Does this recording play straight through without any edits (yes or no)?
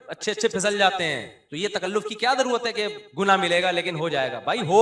yes